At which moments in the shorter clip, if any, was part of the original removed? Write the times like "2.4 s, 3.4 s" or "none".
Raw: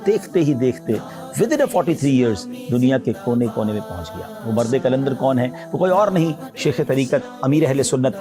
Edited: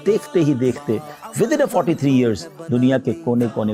none

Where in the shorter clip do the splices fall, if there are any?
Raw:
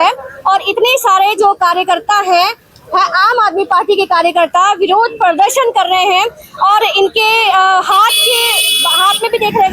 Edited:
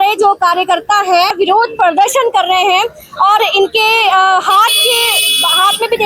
1.3 s

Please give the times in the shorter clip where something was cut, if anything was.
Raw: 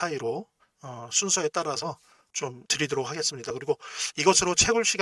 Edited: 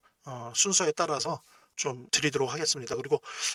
none

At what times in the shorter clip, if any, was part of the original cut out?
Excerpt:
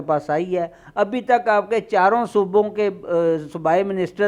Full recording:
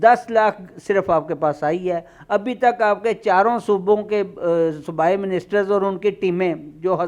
none

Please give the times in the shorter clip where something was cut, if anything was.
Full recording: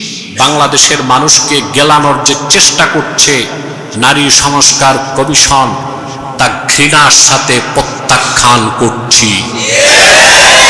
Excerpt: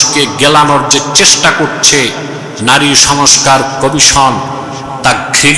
none

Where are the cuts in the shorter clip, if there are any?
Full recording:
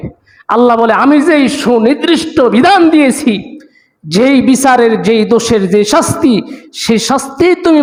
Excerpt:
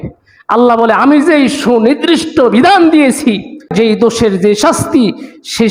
3.7 s

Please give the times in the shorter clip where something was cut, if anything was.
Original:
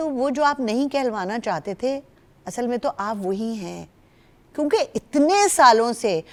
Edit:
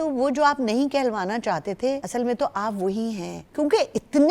2.0 s, 3.4 s

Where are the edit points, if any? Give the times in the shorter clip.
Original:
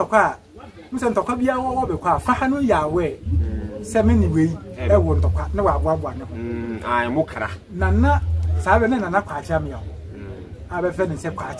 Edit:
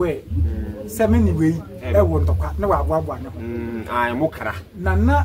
none

